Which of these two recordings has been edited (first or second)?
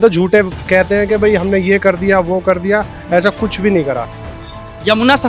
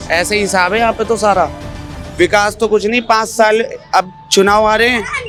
first